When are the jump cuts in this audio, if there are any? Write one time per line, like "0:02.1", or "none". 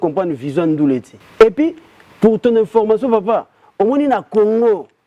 0:01.2